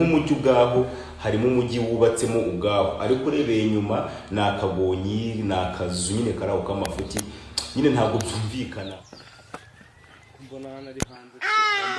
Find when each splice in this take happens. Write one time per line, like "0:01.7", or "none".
0:08.7